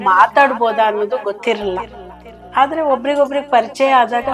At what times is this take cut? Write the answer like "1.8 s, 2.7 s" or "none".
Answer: none